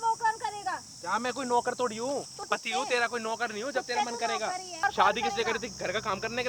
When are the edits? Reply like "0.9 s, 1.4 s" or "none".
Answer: 2.5 s, 4.8 s